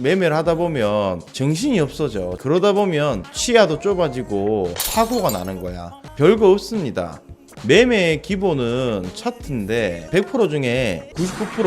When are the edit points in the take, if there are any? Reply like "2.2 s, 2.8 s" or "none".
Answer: 10.0 s